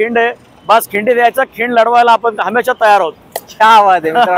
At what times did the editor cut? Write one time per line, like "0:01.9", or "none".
none